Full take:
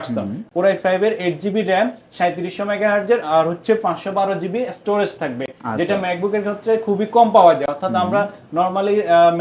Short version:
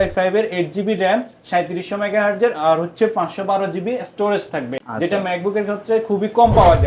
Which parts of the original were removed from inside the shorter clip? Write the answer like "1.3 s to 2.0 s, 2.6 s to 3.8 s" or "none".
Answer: 5.5 s to 5.6 s